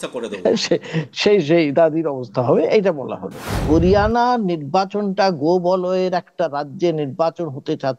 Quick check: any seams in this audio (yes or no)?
yes